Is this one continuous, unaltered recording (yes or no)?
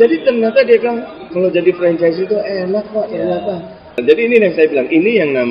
no